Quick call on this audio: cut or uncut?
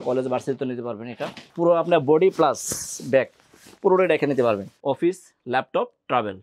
cut